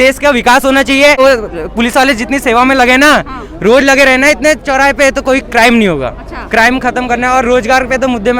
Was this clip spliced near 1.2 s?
yes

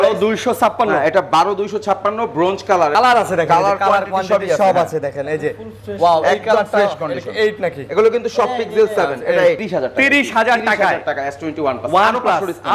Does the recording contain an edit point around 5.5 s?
no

